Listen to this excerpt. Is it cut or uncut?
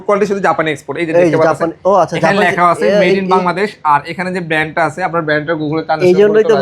uncut